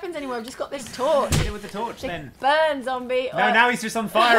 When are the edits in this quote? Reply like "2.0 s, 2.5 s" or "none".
2.3 s